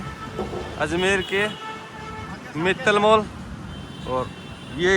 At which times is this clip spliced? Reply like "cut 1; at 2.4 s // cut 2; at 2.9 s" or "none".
none

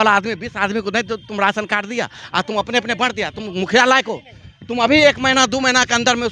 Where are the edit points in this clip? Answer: none

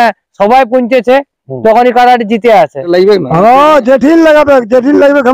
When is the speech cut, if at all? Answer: cut 1; at 2.9 s

